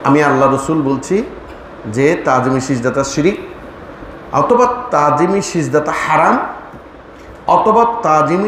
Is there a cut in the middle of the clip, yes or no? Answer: no